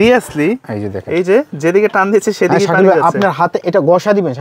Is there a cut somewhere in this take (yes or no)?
no